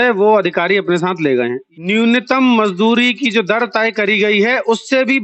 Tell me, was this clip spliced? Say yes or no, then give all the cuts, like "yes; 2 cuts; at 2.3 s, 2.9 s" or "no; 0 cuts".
yes; 1 cut; at 1.6 s